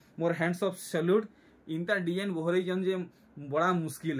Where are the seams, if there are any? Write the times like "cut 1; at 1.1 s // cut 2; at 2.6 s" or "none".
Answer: none